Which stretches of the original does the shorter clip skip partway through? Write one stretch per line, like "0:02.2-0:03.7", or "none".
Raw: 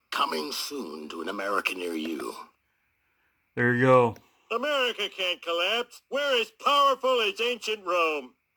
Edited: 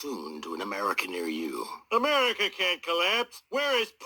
0:02.4-0:04.3